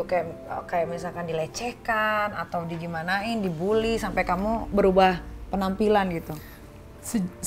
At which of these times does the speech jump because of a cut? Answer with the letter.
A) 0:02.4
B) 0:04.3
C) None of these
C